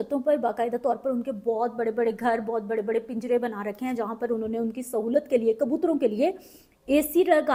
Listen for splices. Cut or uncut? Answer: uncut